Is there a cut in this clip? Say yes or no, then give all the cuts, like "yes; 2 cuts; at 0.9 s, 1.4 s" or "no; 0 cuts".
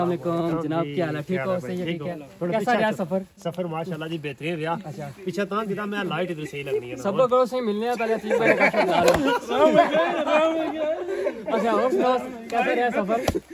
no; 0 cuts